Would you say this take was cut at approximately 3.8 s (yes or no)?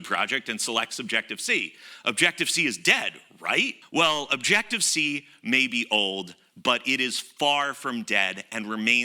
yes